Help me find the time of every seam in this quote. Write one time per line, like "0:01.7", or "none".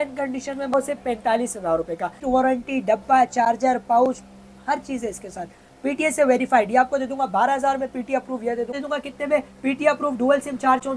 0:00.7
0:02.2
0:08.7